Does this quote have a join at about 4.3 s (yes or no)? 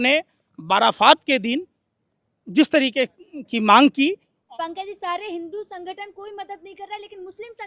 yes